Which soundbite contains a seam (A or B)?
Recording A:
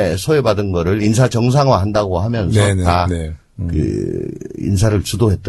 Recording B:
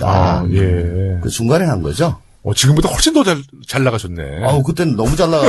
B